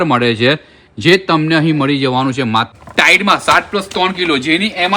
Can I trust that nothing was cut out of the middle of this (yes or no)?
no